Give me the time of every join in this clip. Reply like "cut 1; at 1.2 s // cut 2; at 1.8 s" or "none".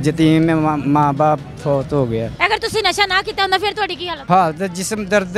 cut 1; at 2.3 s // cut 2; at 4.1 s